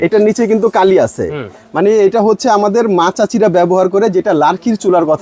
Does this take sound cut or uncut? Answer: uncut